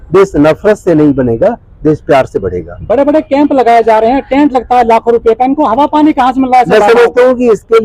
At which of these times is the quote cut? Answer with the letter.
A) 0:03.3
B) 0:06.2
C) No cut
C